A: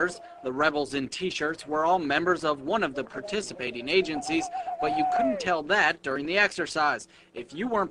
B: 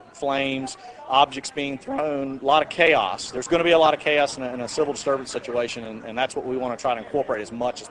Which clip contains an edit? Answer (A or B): B